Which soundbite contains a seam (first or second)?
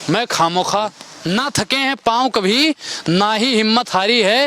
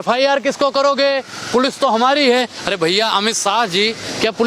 first